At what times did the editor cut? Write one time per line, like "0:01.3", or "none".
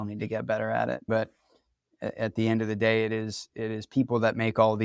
0:01.1